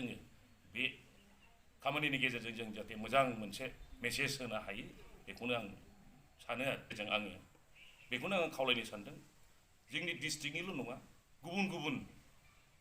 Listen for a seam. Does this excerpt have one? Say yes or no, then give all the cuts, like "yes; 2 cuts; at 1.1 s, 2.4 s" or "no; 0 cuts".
yes; 1 cut; at 6.9 s